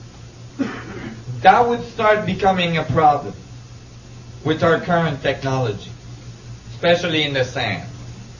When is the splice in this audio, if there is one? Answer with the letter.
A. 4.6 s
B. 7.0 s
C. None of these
B